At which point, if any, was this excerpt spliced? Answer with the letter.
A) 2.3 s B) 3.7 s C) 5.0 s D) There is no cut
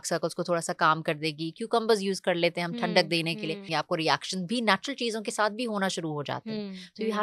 B